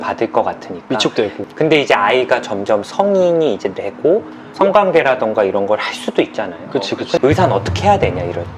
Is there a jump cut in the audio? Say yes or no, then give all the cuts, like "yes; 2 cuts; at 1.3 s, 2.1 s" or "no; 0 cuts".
yes; 2 cuts; at 1.4 s, 7.2 s